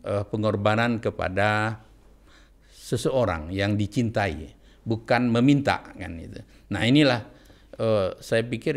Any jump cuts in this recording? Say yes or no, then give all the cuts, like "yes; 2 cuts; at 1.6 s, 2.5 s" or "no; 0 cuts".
no; 0 cuts